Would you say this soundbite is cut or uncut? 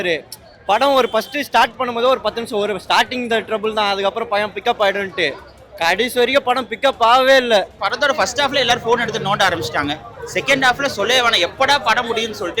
cut